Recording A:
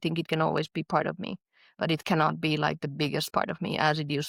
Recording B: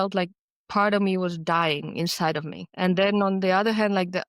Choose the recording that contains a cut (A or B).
B